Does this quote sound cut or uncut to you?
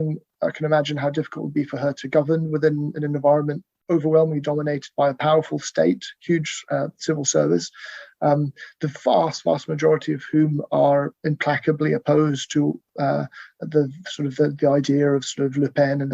uncut